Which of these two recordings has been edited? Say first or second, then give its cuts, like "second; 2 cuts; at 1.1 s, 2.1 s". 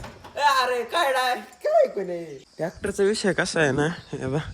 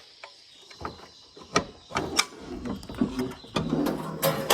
first; 1 cut; at 2.3 s